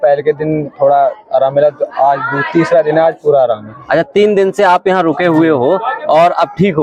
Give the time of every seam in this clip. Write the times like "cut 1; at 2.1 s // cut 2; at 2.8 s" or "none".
none